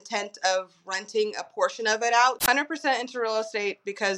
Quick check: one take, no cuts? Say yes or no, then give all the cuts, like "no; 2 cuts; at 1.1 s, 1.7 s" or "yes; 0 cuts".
no; 1 cut; at 2.4 s